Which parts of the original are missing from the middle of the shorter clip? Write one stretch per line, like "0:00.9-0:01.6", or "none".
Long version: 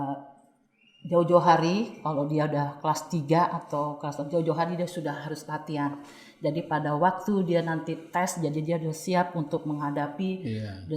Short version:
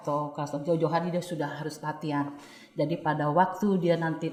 none